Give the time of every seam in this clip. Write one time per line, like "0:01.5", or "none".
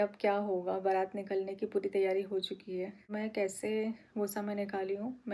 0:03.1